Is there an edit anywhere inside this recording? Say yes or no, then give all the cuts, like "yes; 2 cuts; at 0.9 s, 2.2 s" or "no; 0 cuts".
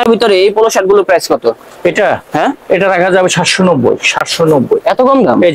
no; 0 cuts